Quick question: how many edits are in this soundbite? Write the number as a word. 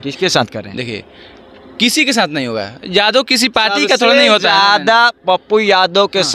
zero